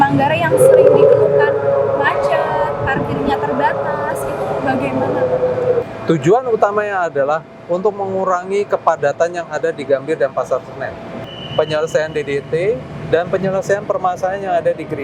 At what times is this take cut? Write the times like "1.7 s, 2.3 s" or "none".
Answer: 5.8 s, 11.1 s